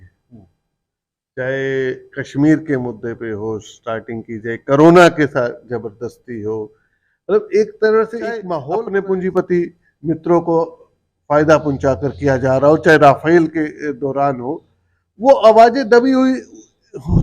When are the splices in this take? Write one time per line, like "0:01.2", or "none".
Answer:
0:08.6